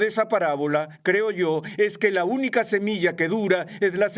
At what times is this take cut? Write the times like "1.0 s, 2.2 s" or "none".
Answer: none